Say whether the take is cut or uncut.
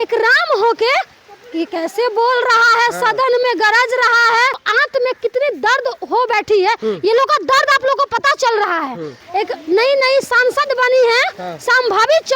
cut